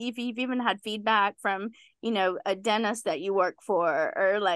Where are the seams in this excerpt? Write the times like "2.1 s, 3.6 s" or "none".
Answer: none